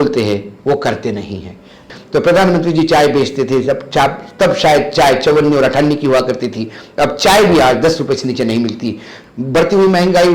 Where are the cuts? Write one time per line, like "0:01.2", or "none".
0:01.7
0:09.1